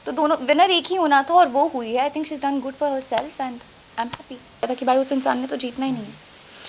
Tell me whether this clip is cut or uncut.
cut